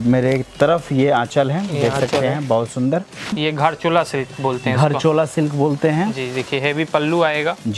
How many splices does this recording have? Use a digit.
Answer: 1